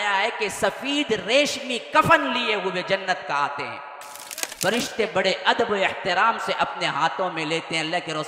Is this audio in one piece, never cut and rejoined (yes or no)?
no